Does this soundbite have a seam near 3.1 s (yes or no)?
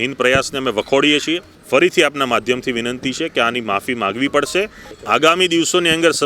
no